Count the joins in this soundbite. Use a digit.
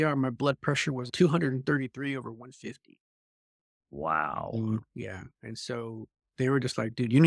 1